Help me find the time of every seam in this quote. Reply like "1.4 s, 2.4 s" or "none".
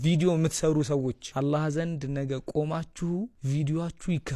1.2 s, 3.4 s